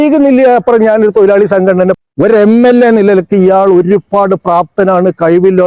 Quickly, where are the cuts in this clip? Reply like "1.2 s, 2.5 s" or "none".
2.0 s